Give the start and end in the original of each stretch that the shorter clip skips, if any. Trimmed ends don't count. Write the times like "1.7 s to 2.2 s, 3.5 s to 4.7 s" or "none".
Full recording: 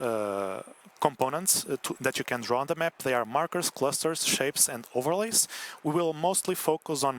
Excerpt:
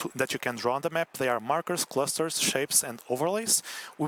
none